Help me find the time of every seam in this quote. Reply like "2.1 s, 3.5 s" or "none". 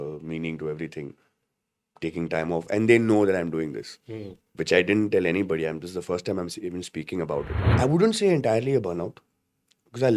7.6 s